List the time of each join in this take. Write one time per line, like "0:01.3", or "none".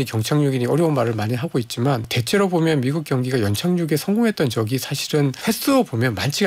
0:02.1
0:05.4